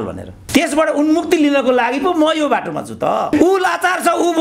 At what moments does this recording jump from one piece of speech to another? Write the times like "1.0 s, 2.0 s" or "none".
3.3 s